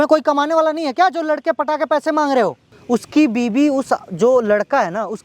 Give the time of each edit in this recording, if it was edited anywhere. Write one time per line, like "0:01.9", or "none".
0:02.7

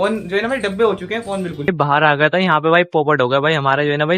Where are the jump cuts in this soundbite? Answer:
0:01.7

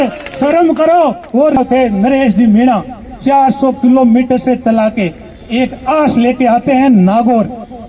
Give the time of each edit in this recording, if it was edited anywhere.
0:01.6

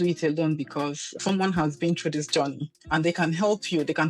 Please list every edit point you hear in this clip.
0:01.1

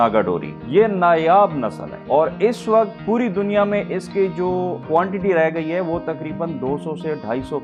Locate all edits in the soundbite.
none

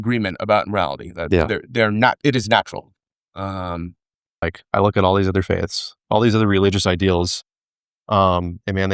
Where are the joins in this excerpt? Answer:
0:04.4

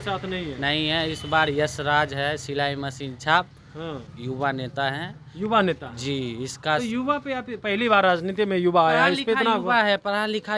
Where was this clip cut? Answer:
0:04.1

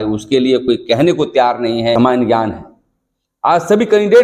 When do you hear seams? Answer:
0:02.0

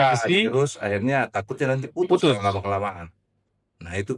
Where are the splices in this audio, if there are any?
none

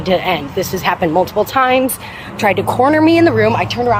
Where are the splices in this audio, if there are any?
0:02.3

